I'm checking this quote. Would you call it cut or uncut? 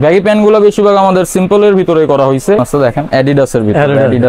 cut